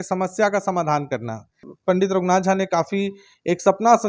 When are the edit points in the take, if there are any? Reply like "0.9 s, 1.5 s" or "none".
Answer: 1.6 s